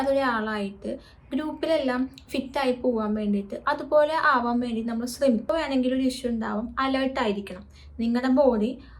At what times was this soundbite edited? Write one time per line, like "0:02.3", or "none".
0:05.5